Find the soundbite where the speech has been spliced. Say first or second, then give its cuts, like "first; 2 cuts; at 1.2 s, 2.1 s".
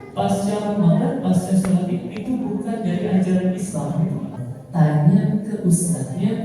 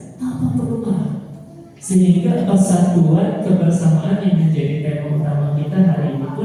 first; 1 cut; at 4.4 s